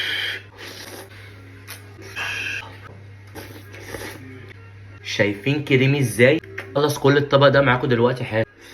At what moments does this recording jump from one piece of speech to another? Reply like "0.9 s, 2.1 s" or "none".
0.9 s, 2.2 s, 6.6 s

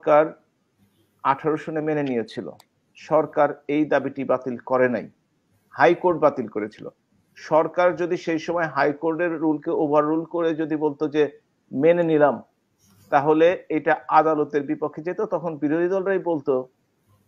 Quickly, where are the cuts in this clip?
none

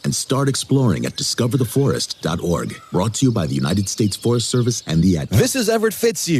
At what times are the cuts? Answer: 5.2 s

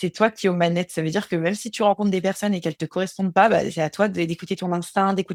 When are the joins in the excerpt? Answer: none

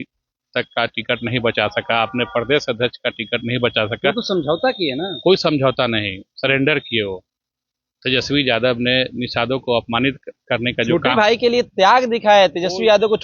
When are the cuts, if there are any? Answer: none

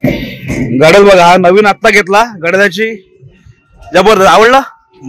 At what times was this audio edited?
none

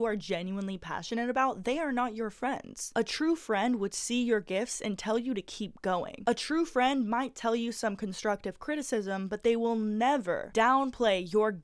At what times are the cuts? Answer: 6.1 s

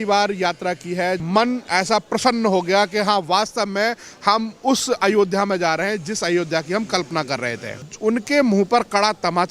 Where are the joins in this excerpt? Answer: 1.2 s, 7.9 s

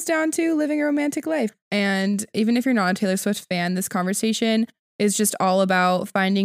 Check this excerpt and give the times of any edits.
1.5 s

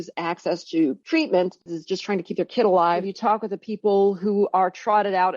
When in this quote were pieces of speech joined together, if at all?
1.0 s, 1.8 s, 3.1 s

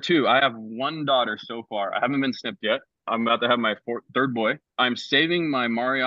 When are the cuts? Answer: 4.6 s

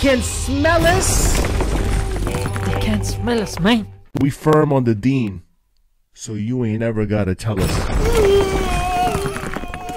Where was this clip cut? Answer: none

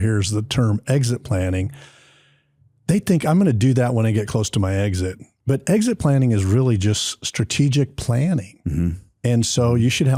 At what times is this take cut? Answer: none

